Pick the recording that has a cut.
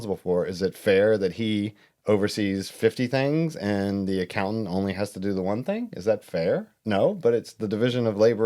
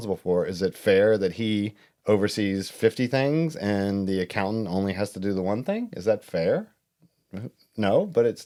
first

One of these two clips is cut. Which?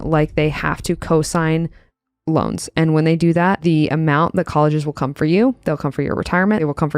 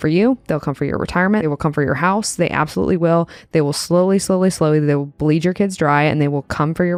first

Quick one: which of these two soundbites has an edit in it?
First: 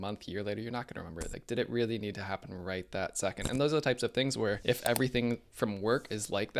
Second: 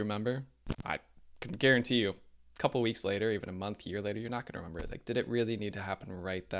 first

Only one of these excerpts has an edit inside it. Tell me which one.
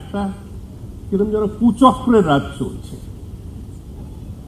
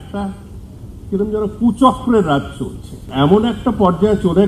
second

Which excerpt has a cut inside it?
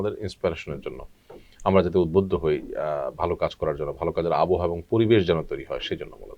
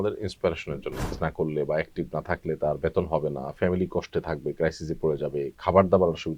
second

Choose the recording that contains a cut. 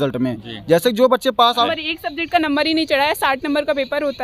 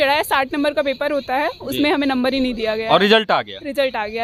first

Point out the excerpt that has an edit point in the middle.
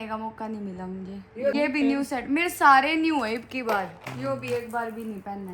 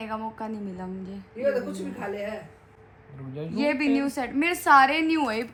first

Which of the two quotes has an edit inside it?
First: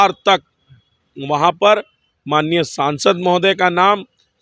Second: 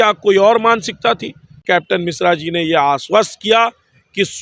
second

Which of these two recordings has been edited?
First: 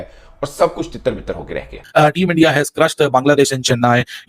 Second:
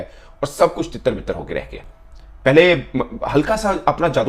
first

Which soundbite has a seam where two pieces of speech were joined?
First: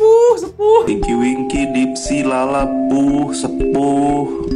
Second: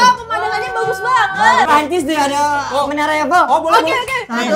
second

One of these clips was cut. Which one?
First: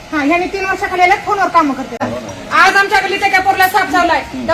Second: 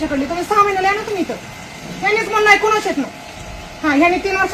first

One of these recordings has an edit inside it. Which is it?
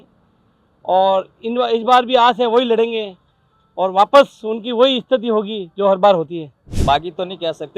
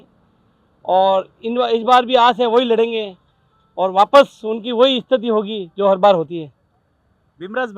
first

